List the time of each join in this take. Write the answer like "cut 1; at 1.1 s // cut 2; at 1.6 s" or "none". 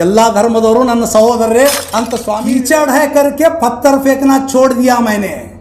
cut 1; at 2.2 s

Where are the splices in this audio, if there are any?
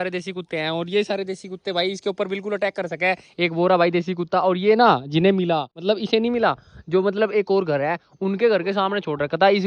none

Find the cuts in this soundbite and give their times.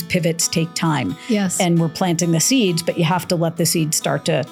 none

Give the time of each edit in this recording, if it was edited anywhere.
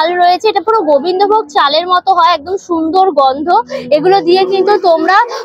none

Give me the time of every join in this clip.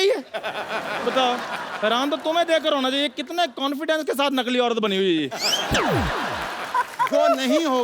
cut 1; at 6.6 s

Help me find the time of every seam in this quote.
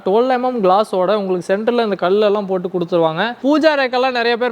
cut 1; at 3.3 s

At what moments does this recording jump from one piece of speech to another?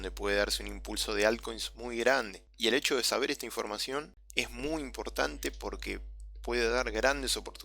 cut 1; at 2.4 s // cut 2; at 4.2 s

